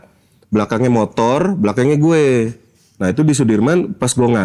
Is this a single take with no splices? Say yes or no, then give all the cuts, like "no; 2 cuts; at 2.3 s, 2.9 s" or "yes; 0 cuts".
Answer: yes; 0 cuts